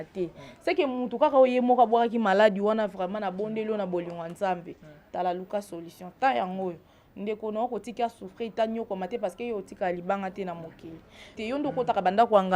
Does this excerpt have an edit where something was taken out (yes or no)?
yes